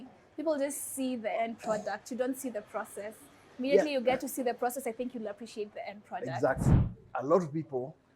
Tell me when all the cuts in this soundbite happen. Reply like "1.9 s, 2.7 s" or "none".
6.9 s